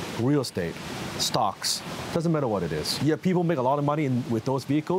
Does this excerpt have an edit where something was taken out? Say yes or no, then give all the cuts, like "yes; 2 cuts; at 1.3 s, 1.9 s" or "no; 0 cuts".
yes; 1 cut; at 2.9 s